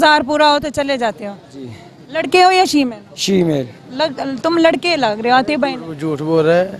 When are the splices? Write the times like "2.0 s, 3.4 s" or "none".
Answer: none